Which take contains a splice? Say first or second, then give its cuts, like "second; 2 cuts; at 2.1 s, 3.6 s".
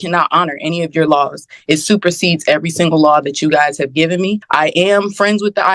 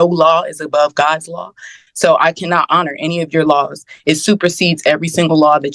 first; 1 cut; at 4.4 s